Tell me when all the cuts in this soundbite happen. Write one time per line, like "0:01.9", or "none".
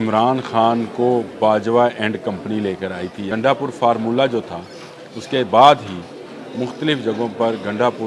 0:03.3